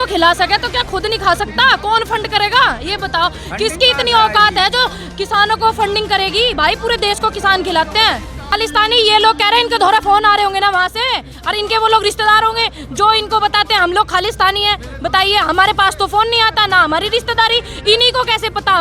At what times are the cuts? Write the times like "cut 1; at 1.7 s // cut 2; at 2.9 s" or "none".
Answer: cut 1; at 8.5 s